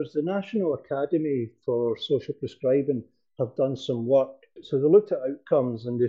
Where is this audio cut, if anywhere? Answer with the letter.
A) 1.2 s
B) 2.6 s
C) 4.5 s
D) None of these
C